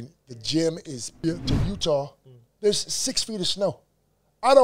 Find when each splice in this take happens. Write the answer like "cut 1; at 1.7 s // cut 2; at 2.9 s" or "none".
cut 1; at 1.2 s